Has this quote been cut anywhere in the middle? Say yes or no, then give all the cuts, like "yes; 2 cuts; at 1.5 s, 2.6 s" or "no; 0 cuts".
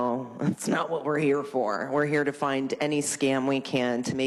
no; 0 cuts